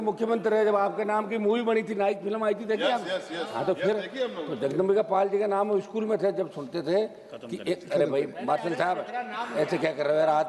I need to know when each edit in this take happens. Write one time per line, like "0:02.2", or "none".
none